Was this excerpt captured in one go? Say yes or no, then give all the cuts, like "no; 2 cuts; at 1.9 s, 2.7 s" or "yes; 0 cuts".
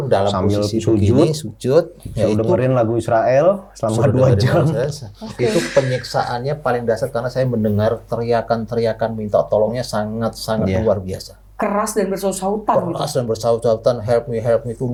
yes; 0 cuts